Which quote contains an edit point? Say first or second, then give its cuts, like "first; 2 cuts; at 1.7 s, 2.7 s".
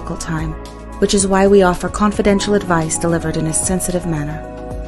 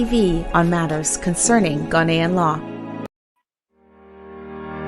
second; 1 cut; at 3.2 s